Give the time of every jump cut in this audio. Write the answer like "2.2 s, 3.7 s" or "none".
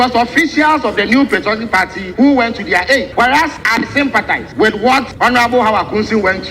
2.0 s, 3.3 s, 4.5 s, 5.1 s

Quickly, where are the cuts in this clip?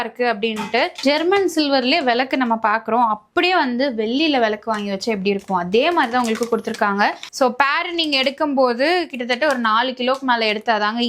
1.0 s, 7.2 s

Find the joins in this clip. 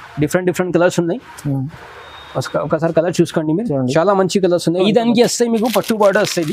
4.8 s

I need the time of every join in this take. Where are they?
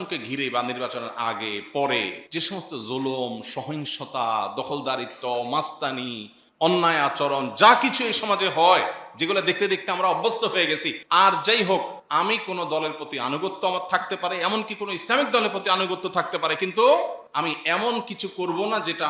2.2 s, 10.9 s, 12.0 s, 17.2 s

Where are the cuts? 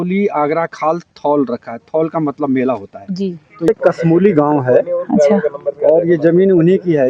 3.7 s

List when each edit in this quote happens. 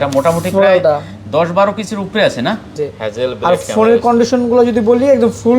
2.8 s

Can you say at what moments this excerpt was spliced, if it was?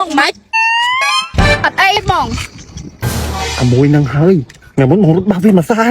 2.0 s

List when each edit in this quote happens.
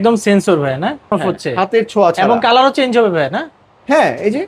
none

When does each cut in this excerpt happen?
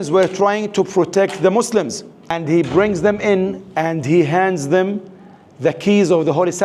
2.4 s

